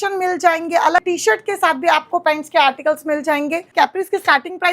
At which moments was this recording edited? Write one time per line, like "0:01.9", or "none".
0:01.0
0:03.7